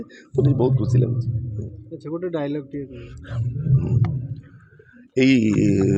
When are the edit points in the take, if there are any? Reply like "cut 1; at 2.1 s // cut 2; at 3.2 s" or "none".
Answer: none